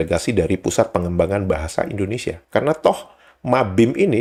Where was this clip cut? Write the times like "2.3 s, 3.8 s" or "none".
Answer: none